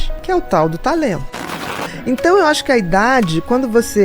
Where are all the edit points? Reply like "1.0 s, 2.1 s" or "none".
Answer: 1.7 s